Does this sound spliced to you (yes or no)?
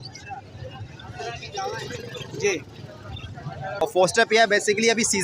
yes